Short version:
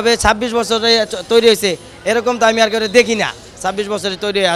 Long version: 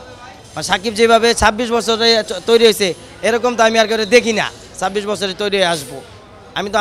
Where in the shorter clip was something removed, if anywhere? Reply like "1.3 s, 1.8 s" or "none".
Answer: none